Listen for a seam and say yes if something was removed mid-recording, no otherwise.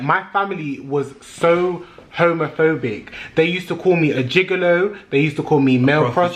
no